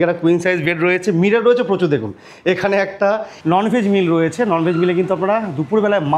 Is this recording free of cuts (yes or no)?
no